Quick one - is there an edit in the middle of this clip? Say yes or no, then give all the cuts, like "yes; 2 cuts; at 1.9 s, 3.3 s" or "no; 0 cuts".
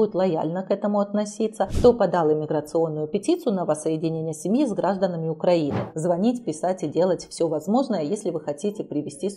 yes; 2 cuts; at 1.7 s, 5.9 s